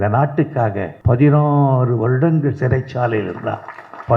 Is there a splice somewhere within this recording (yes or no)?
yes